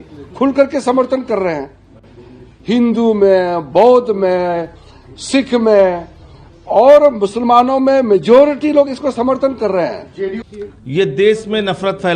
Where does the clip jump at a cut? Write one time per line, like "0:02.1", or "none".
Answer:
0:10.5